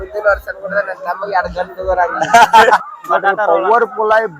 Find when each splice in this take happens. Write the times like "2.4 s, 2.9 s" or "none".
2.8 s